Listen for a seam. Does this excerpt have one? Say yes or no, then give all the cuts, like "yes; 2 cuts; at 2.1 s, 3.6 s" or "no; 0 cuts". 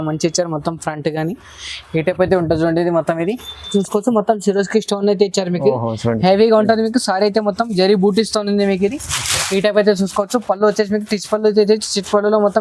yes; 1 cut; at 3.7 s